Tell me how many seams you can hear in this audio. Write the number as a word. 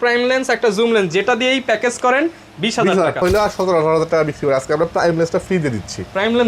one